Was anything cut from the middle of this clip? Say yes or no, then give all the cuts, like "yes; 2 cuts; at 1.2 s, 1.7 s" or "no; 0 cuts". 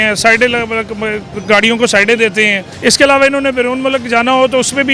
yes; 2 cuts; at 1.3 s, 2.6 s